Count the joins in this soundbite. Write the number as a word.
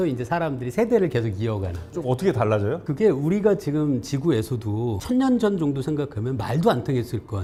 zero